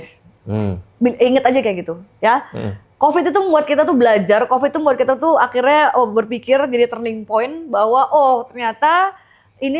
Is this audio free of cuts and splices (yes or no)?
yes